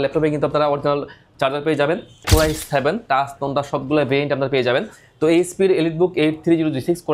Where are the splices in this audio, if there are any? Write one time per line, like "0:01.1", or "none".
0:02.2